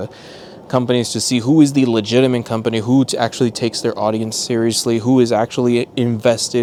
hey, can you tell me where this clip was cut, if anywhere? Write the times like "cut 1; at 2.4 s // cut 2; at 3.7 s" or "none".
none